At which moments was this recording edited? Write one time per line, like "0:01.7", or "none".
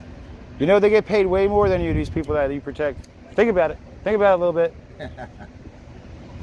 none